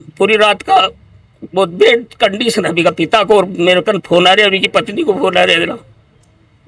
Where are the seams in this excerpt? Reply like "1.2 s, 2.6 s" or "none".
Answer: none

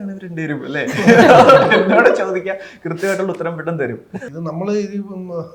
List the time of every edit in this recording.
4.1 s

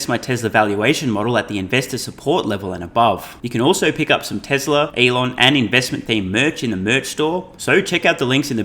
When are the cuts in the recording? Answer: 3.4 s, 4.9 s, 7.5 s

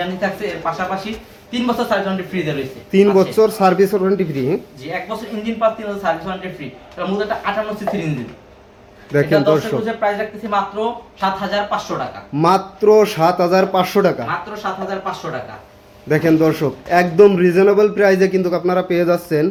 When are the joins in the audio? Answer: none

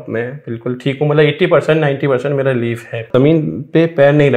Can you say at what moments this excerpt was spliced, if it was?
3.1 s

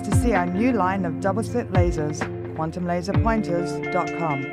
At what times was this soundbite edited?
3.0 s

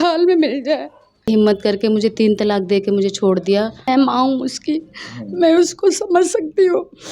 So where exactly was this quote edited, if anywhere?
1.3 s, 3.9 s

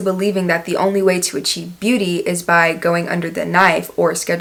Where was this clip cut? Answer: none

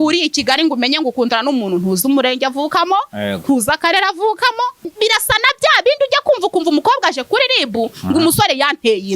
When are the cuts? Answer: 4.9 s

